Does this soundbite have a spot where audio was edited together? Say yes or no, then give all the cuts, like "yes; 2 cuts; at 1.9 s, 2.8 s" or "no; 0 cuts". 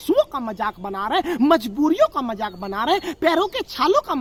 no; 0 cuts